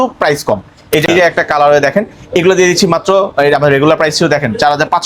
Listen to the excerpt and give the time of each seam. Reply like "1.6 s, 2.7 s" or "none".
1.0 s